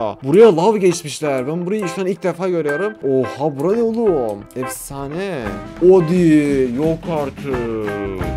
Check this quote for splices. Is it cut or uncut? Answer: cut